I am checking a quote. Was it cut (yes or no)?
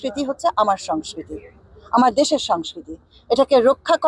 no